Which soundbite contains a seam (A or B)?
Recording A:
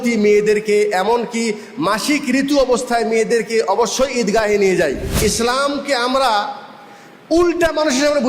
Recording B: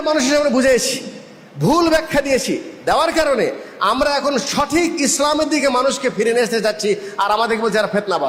A